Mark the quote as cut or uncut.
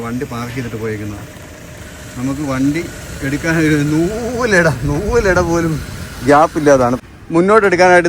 cut